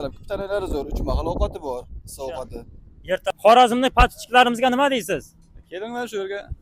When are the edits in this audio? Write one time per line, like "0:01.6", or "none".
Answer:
0:03.3